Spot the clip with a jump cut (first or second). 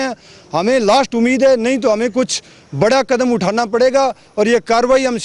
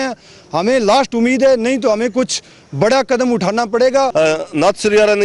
second